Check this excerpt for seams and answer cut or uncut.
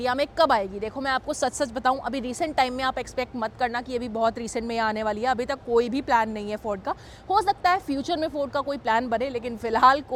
uncut